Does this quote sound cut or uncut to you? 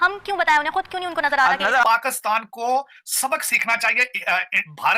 cut